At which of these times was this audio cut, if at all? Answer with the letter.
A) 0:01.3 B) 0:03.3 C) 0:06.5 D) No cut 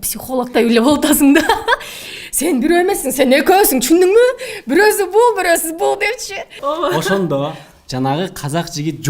C